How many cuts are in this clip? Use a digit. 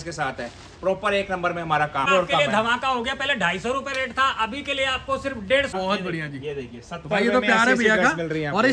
2